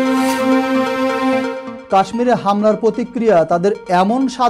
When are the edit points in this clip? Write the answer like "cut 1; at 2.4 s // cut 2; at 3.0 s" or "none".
cut 1; at 1.6 s